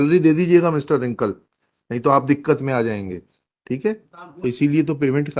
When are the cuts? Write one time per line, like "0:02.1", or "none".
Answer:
0:04.1